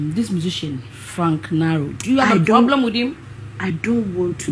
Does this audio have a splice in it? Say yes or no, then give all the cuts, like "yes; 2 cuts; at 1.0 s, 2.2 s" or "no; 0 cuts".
no; 0 cuts